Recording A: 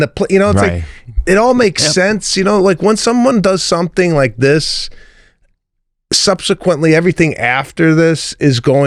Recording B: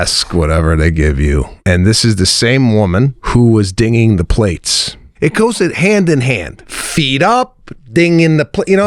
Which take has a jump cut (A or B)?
B